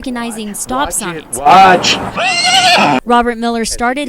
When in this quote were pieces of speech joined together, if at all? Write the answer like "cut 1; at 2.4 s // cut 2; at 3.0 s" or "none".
cut 1; at 2.1 s